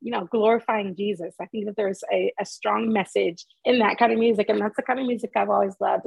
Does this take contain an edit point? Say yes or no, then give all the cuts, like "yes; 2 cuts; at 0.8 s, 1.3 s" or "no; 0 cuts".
no; 0 cuts